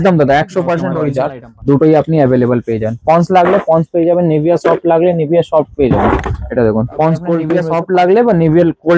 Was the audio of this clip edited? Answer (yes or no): yes